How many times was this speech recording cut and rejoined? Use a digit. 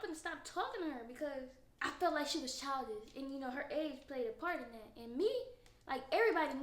1